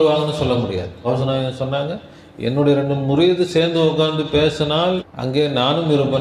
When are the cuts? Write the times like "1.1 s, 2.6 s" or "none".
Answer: 0.9 s, 5.1 s

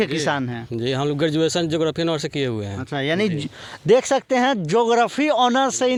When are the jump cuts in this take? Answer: none

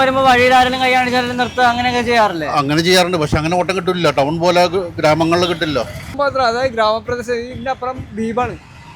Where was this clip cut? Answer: none

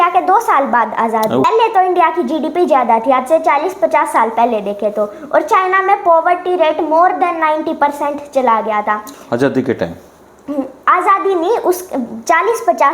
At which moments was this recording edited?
1.4 s

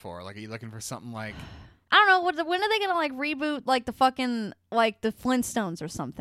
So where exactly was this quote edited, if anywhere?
1.7 s

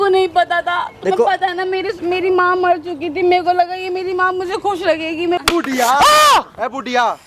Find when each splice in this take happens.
5.4 s

